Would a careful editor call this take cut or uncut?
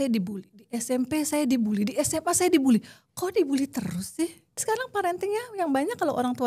cut